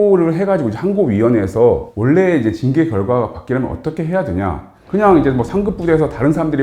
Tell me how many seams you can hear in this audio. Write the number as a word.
two